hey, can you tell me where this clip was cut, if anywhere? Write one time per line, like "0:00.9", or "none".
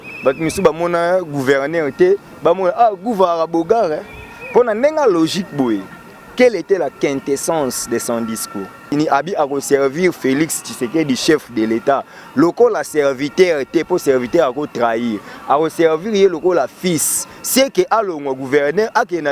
0:08.8